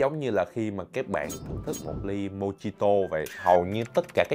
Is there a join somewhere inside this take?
yes; 1 cut; at 3.4 s

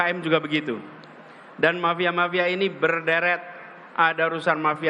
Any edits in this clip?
no; 0 cuts

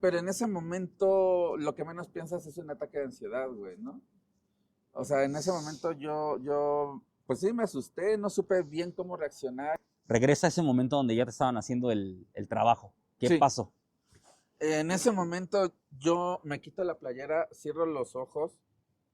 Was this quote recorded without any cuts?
no; 1 cut; at 9.9 s

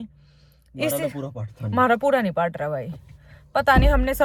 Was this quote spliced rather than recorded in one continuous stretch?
no; 0 cuts

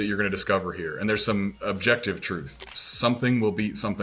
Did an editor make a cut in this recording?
yes; 2 cuts; at 1.6 s, 2.6 s

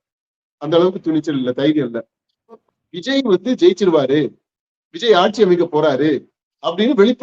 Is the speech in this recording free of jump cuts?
no; 1 cut; at 2.6 s

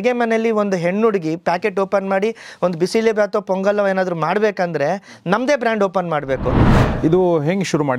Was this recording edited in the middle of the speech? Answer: yes; 1 cut; at 6.7 s

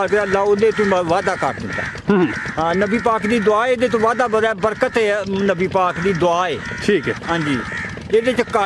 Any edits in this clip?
no; 0 cuts

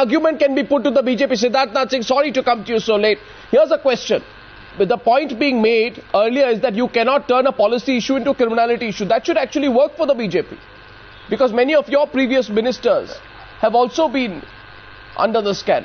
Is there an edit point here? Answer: yes; 1 cut; at 1.6 s

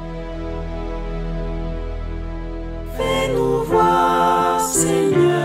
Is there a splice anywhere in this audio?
yes; 1 cut; at 2.9 s

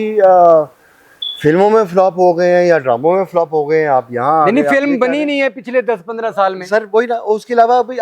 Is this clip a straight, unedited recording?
yes; 0 cuts

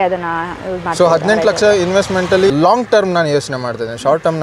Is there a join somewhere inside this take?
yes; 1 cut; at 2.5 s

